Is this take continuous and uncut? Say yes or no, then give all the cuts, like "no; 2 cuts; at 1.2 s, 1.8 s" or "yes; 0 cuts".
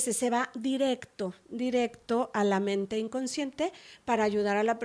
yes; 0 cuts